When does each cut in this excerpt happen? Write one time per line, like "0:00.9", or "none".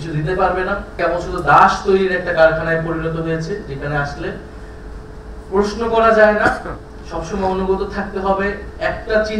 0:01.0